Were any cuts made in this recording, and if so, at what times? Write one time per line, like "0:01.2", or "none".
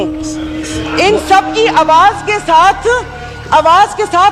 none